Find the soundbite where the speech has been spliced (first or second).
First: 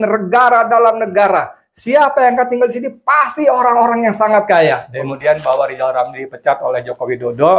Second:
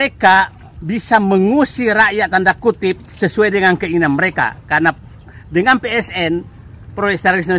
first